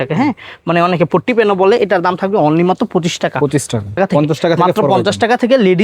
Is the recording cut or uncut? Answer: cut